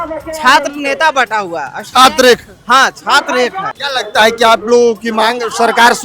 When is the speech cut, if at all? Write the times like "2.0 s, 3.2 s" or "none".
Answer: 3.7 s